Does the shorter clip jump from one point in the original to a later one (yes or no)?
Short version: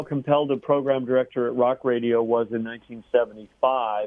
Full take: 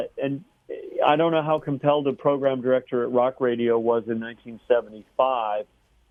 no